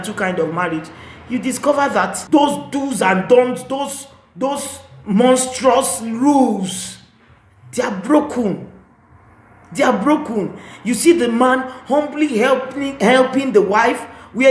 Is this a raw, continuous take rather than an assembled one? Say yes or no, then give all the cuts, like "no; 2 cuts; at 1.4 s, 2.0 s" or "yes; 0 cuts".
no; 1 cut; at 2.2 s